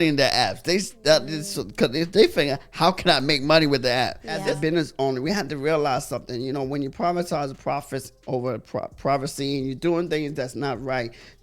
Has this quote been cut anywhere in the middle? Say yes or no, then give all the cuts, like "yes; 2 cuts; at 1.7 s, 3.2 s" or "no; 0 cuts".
yes; 1 cut; at 4.4 s